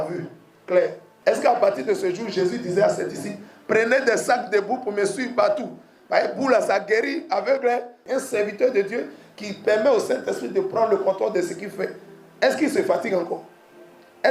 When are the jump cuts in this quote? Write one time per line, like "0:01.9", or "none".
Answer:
0:01.1
0:08.0